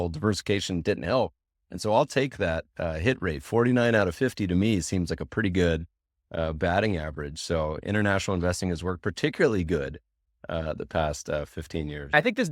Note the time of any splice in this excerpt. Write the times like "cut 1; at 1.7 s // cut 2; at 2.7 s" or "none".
none